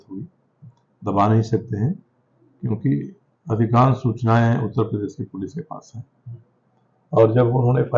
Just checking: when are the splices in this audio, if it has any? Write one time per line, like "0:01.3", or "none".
none

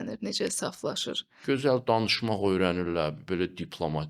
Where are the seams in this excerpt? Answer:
0:01.3

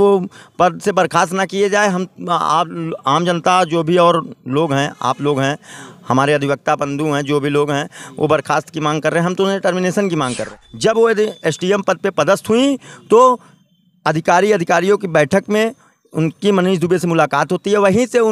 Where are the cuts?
0:10.5

